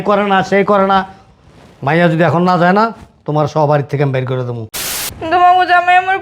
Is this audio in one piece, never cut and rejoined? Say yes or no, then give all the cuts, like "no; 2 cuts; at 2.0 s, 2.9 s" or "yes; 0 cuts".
no; 1 cut; at 4.8 s